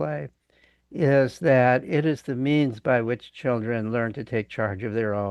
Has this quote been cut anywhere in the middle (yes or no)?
no